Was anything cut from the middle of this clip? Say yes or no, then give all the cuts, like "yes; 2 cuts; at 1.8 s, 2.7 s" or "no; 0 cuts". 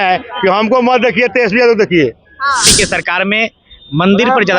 yes; 1 cut; at 2.7 s